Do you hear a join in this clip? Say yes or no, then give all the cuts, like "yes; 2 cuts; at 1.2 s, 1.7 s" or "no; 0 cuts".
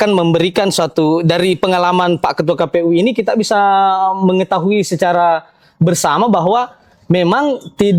no; 0 cuts